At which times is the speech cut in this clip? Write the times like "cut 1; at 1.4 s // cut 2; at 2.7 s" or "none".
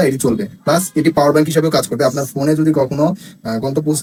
none